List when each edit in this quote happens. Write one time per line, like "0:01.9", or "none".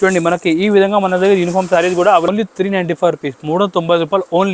0:02.3